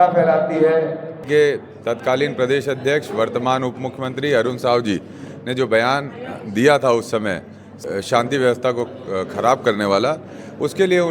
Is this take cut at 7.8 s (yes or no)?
yes